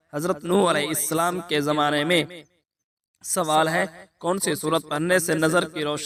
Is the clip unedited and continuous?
yes; 0 cuts

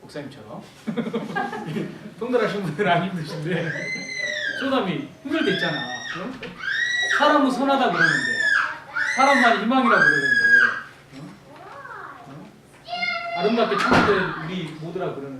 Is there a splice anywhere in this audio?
no; 0 cuts

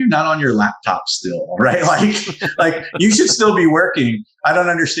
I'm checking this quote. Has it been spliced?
no; 0 cuts

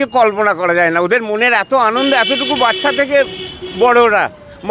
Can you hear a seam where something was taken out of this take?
no; 0 cuts

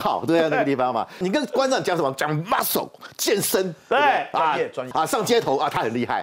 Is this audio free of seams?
no; 2 cuts; at 1.2 s, 4.9 s

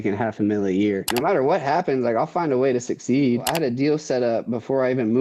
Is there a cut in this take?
yes; 2 cuts; at 1.1 s, 3.5 s

